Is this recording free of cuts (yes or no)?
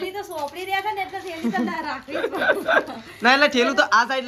yes